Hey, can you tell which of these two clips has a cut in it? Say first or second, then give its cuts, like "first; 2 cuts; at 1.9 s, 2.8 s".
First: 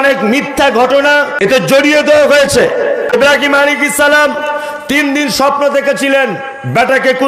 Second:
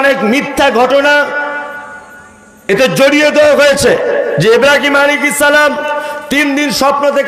first; 2 cuts; at 1.3 s, 3.2 s